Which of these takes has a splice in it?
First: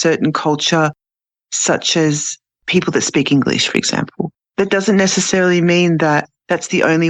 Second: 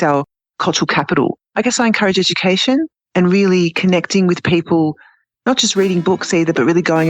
second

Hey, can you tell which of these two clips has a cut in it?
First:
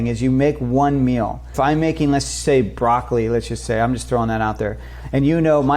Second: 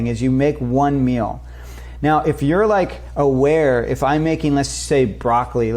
first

